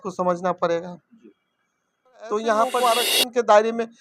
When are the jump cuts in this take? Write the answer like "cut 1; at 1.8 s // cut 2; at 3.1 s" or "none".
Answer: cut 1; at 3.0 s